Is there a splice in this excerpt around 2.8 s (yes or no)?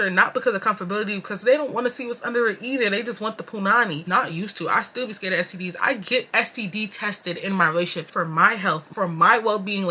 no